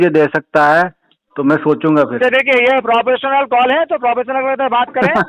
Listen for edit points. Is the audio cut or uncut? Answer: uncut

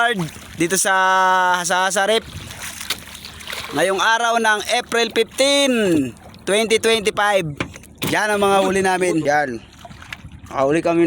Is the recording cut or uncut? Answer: cut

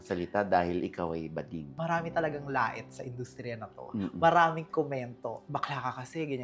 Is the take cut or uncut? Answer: cut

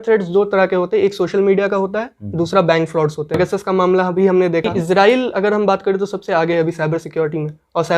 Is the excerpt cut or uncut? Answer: cut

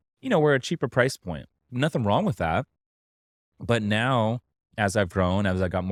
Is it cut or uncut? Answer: uncut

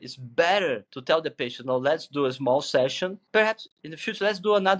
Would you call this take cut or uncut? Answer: cut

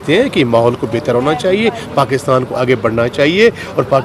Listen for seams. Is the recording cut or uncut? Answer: uncut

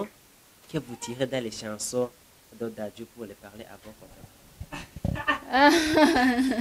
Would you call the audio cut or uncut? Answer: uncut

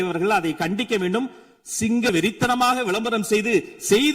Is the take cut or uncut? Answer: cut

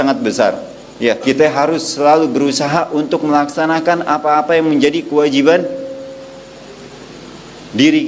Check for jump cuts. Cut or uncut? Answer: cut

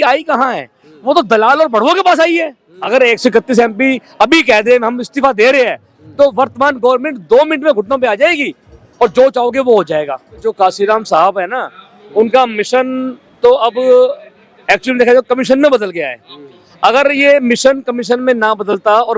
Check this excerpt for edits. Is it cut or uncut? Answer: cut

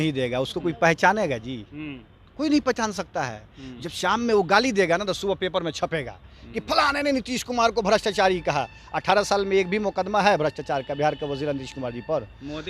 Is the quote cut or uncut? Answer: uncut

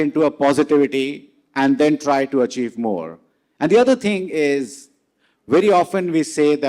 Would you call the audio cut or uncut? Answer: uncut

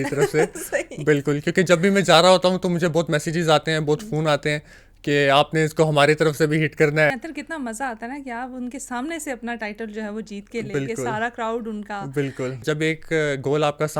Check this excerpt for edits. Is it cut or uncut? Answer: cut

